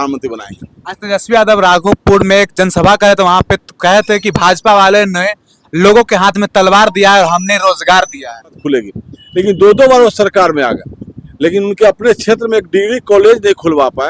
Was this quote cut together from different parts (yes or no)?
no